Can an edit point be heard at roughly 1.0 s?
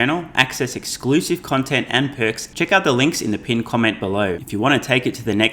no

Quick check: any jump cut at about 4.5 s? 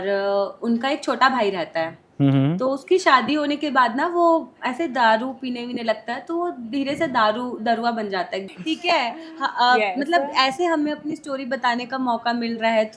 no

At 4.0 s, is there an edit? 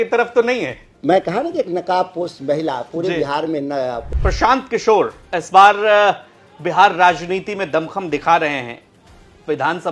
yes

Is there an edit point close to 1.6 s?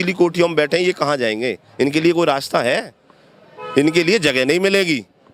no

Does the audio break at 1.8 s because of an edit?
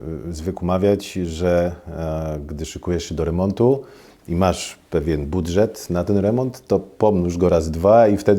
no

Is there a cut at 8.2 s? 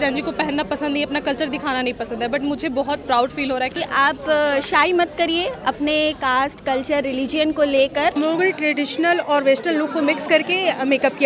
yes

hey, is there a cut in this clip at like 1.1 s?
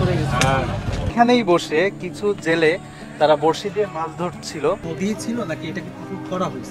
yes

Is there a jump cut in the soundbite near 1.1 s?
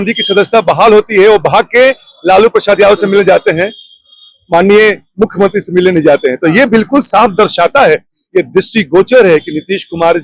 no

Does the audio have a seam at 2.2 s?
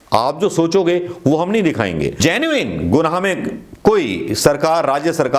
yes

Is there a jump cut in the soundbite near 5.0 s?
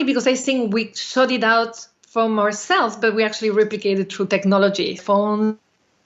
yes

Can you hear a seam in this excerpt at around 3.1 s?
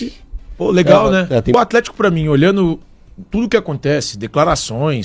no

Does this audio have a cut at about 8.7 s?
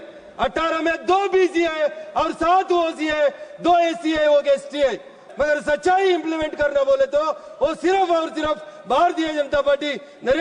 no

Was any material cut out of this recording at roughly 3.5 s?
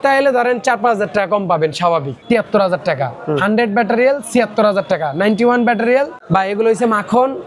no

